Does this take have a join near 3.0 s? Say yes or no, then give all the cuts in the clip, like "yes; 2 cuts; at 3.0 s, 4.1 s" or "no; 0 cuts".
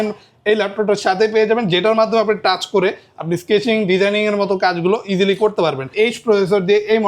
no; 1 cut; at 5.9 s